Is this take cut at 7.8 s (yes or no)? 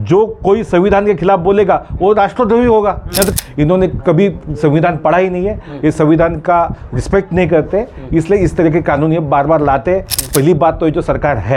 no